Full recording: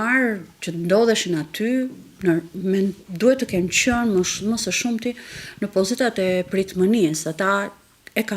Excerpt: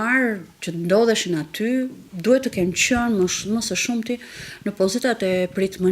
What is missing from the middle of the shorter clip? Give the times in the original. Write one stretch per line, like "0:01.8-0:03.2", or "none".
0:02.1-0:03.0